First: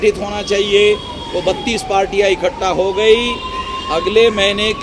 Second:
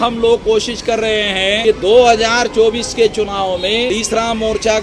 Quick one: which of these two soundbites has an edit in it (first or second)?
second